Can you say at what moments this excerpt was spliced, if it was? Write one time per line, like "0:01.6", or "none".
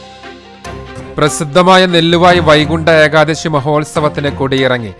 0:00.9